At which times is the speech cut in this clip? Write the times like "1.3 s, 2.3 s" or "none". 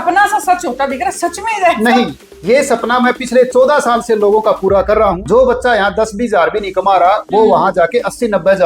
5.2 s